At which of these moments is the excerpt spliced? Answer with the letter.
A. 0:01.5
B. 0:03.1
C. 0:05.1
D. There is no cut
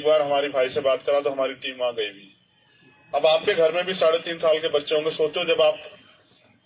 C